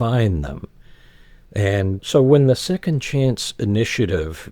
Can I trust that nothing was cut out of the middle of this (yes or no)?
no